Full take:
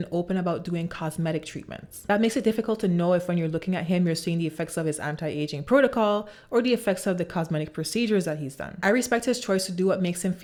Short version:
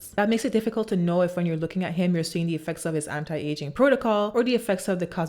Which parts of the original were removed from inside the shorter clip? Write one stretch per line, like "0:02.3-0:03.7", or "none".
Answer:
0:06.2-0:06.5

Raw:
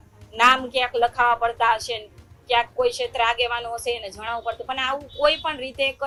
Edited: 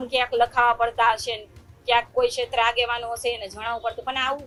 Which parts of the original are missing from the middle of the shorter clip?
none

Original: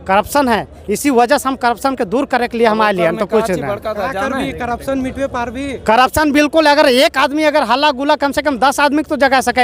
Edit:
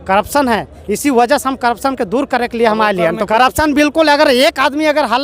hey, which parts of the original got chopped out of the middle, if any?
0:03.3-0:05.8

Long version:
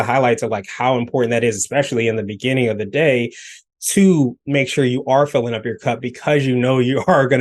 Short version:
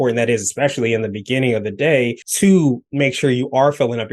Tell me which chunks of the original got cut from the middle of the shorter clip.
0:03.4-0:03.8

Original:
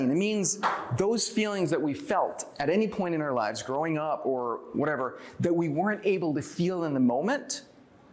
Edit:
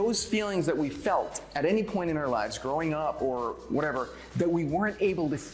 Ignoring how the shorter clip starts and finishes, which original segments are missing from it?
none

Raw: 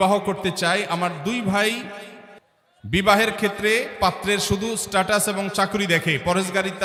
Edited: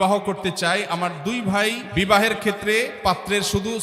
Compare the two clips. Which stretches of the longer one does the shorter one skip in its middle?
0:01.8-0:02.8

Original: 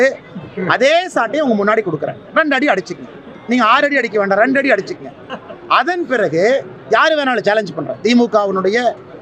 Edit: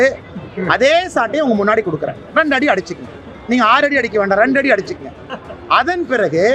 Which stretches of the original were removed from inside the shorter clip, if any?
none

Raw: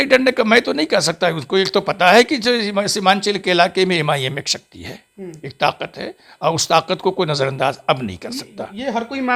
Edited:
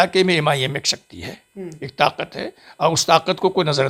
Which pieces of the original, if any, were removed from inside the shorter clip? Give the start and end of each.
none

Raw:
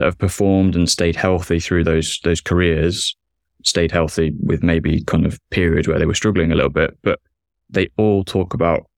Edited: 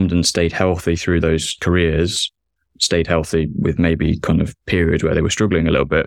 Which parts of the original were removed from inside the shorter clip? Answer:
0:02.2-0:02.4

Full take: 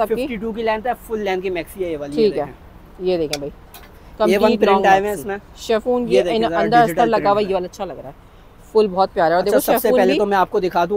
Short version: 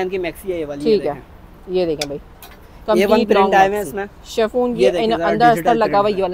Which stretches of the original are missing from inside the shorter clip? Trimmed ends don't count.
none

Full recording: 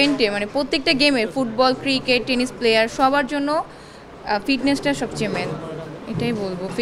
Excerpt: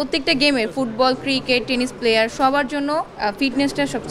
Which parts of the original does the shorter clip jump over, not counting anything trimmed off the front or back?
0:03.7-0:04.2

